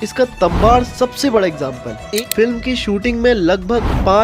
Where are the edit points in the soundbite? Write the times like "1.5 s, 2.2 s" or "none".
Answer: 2.0 s